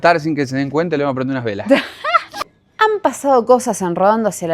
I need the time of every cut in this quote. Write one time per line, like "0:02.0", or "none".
0:02.5